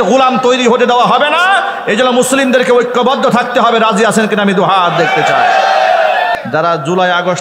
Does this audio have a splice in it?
yes; 1 cut; at 6.4 s

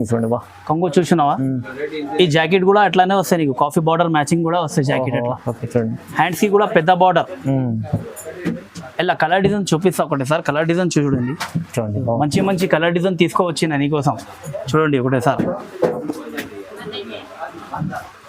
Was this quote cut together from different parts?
no; 0 cuts

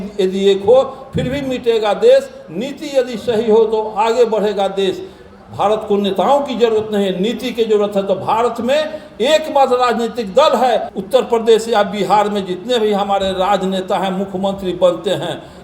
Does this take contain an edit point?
yes; 1 cut; at 10.9 s

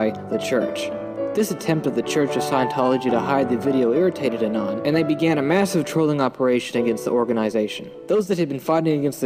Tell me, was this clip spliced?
no; 0 cuts

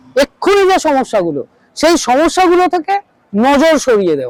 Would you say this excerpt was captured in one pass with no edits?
yes; 0 cuts

